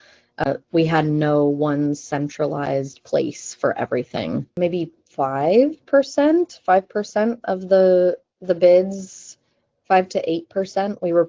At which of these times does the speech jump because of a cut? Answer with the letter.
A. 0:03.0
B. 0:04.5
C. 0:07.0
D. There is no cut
B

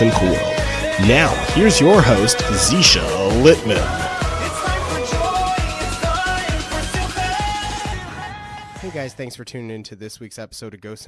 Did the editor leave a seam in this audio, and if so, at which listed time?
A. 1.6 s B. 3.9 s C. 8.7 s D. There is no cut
C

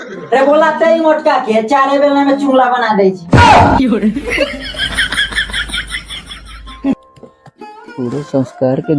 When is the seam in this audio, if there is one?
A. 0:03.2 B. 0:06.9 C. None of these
B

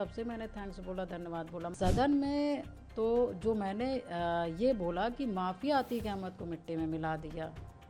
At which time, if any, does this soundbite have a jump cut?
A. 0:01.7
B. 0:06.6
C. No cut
A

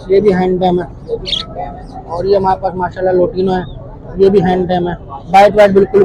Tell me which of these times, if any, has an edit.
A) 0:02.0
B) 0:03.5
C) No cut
C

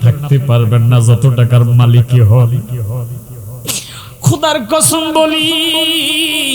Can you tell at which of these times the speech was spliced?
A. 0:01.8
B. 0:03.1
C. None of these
C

